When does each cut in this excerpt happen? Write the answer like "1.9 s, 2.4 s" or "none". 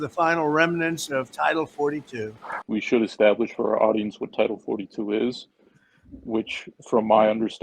2.6 s